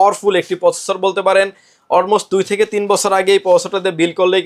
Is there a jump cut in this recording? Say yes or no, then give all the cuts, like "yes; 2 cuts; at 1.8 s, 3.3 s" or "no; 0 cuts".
no; 0 cuts